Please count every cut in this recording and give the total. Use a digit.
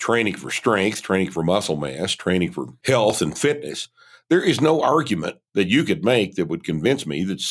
1